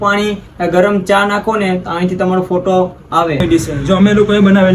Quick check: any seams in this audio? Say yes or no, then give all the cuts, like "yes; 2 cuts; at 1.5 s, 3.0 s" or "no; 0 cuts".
yes; 1 cut; at 3.4 s